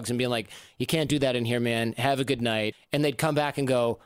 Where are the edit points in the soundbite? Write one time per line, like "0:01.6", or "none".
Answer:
0:02.8